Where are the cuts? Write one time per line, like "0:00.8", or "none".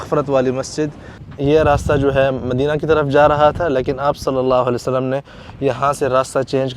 0:01.2